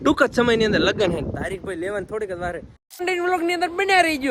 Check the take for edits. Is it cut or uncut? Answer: cut